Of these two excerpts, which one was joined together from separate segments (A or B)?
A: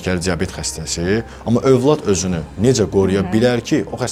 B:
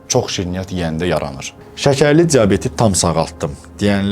B